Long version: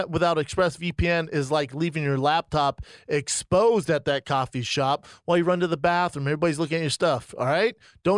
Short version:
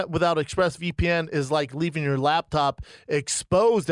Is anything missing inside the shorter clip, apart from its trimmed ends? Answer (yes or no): no